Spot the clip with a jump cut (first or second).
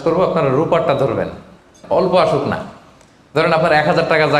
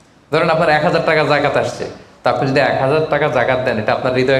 first